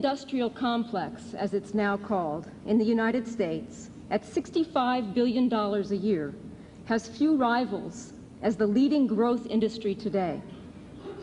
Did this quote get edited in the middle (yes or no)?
yes